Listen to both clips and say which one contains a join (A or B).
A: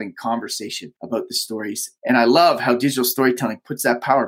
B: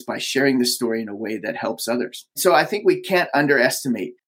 A